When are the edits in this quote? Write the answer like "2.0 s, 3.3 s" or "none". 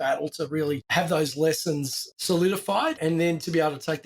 3.0 s